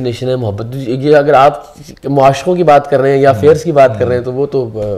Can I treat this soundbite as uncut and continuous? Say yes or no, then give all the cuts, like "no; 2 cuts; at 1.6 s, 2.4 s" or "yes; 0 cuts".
yes; 0 cuts